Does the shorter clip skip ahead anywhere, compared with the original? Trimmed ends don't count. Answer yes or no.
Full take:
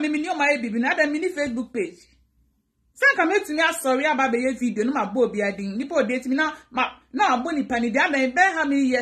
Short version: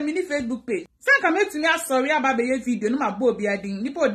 yes